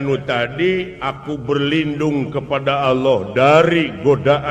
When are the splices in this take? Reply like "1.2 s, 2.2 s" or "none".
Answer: 1.0 s